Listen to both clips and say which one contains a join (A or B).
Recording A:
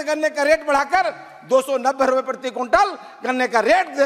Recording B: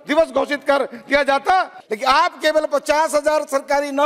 B